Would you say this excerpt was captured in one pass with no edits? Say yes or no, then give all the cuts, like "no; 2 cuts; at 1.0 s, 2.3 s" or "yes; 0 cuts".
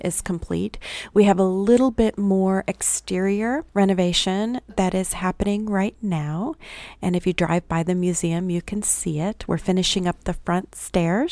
yes; 0 cuts